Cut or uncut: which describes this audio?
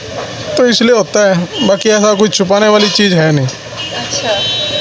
uncut